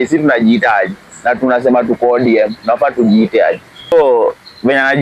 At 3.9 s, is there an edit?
yes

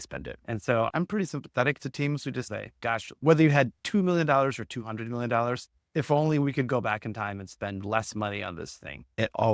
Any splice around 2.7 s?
yes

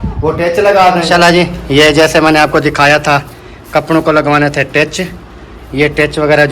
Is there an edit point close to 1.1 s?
yes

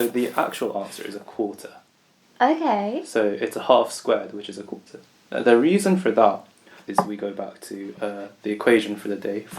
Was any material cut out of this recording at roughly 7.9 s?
yes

